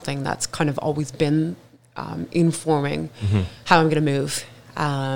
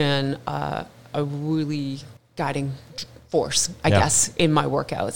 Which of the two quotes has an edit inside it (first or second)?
second